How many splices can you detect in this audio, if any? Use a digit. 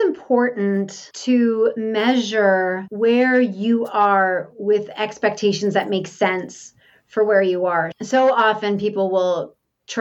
3